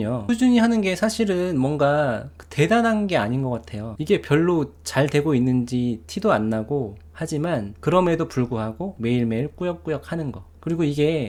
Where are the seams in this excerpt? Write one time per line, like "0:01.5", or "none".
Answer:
none